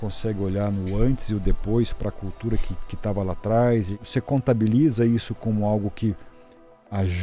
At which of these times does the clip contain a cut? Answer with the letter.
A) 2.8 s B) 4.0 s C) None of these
B